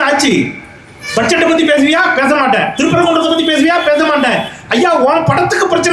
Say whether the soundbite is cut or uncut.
uncut